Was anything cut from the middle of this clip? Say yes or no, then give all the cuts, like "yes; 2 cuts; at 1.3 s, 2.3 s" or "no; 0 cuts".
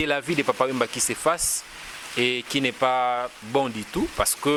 no; 0 cuts